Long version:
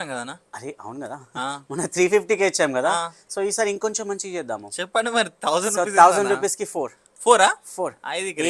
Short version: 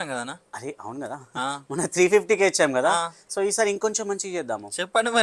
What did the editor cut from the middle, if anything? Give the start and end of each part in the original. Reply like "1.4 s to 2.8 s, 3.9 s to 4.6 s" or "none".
none